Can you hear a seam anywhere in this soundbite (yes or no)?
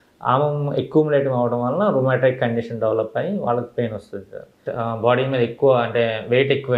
yes